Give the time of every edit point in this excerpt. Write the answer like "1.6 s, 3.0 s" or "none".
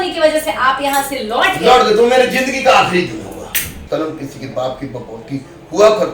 3.8 s